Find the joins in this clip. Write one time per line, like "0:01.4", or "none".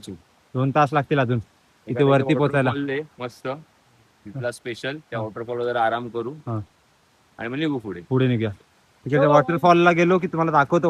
none

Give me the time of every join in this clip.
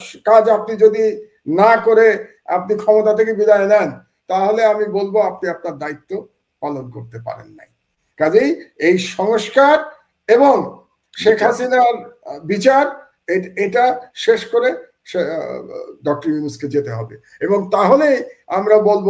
none

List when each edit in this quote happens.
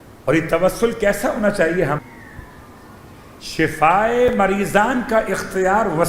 0:02.0

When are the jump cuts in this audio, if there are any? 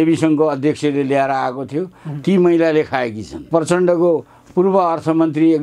0:03.5

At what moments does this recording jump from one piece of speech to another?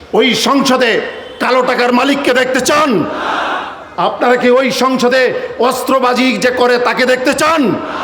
none

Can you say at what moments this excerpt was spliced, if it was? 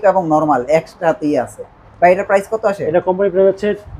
none

